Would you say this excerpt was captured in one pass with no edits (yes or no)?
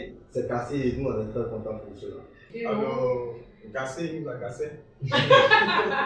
no